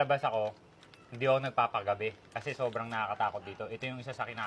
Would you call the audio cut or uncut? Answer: uncut